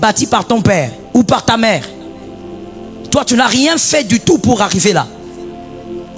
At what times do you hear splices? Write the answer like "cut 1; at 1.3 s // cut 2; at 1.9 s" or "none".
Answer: cut 1; at 1.0 s